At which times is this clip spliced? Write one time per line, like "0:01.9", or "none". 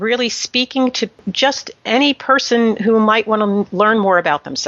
0:01.3

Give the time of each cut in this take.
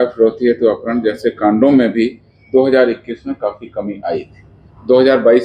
none

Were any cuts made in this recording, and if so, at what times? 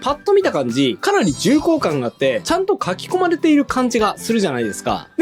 0:02.4

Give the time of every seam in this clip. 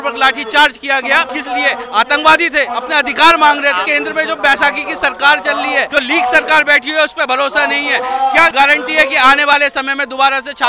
0:01.3
0:02.7
0:03.9
0:05.9
0:08.5

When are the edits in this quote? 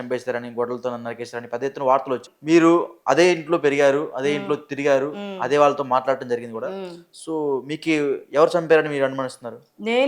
0:02.3

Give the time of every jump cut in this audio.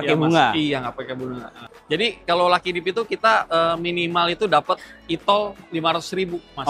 0:01.5

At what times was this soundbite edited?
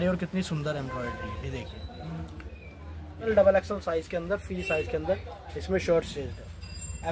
0:03.3

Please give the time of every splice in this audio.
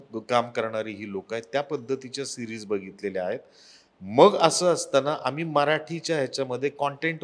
none

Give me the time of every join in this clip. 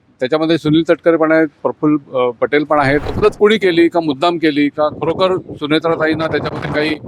0:03.1

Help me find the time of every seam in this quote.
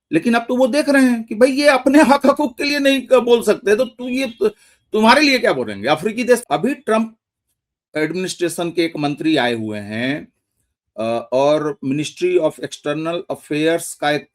0:06.4

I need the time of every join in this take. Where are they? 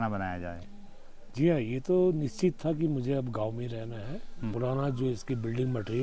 0:04.5

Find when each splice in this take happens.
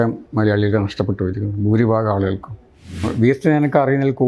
0:03.1

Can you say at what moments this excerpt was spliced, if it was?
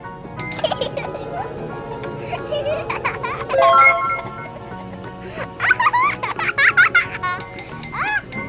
0:03.6

